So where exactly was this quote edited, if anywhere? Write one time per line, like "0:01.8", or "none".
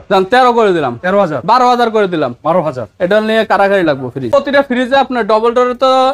0:04.3